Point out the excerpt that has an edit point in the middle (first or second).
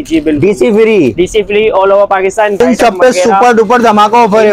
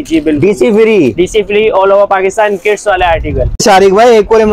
first